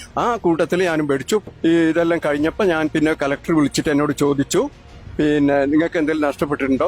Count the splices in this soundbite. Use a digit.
1